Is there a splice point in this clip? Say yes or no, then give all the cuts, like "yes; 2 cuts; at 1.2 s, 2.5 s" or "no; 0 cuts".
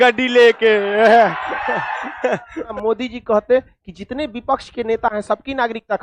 yes; 1 cut; at 2.7 s